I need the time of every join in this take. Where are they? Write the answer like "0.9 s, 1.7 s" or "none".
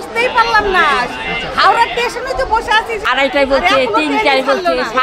3.0 s